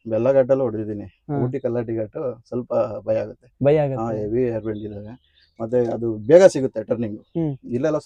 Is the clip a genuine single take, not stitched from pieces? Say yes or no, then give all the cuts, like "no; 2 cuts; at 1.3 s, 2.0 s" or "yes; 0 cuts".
yes; 0 cuts